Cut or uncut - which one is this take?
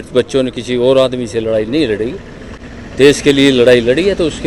uncut